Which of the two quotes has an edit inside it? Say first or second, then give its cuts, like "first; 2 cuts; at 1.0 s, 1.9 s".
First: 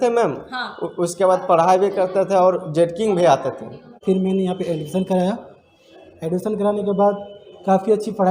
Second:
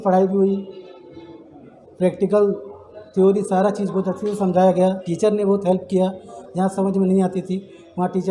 first; 1 cut; at 3.9 s